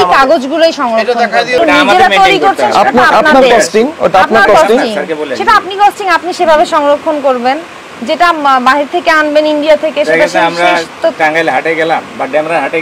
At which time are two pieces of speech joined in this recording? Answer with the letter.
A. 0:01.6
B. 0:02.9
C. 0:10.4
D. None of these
A